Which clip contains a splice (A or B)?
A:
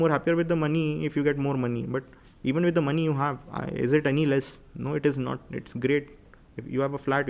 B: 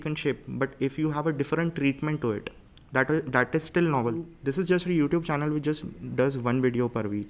B